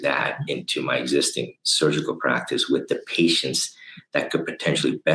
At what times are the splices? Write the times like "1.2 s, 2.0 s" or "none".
none